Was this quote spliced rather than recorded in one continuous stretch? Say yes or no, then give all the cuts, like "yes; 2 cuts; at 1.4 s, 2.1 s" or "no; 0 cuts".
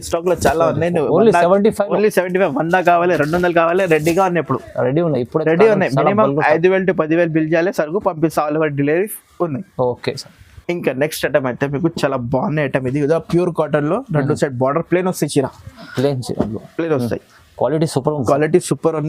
no; 0 cuts